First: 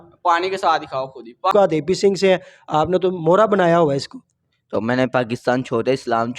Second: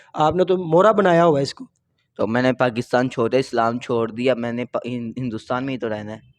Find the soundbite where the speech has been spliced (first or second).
first